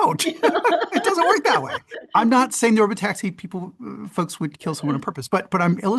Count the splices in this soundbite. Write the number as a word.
one